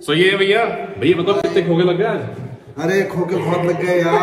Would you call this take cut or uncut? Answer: uncut